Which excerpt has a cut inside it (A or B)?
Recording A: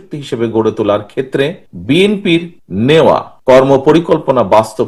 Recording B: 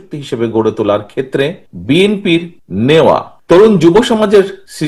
B